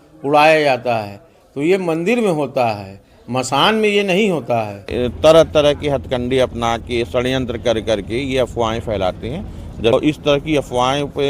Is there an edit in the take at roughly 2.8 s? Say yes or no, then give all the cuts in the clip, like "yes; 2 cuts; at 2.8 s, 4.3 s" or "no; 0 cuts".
no; 2 cuts; at 4.9 s, 9.9 s